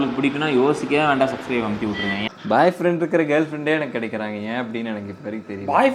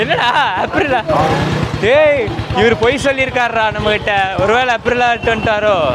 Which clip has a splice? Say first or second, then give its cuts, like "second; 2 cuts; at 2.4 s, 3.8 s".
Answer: first; 1 cut; at 2.2 s